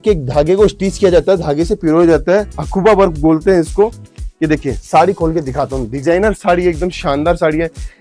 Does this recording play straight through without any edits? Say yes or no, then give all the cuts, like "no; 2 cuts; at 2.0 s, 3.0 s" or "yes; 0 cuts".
yes; 0 cuts